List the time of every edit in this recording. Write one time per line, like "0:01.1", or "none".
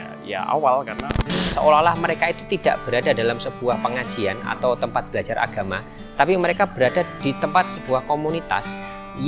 0:01.4